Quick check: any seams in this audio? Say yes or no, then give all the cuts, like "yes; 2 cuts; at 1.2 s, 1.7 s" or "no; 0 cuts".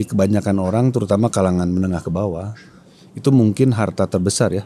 no; 0 cuts